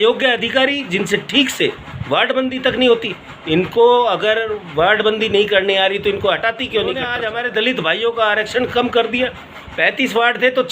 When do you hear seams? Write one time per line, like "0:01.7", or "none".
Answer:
0:07.1